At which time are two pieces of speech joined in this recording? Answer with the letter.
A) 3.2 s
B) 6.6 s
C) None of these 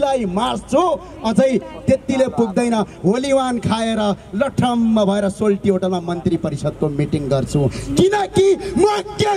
C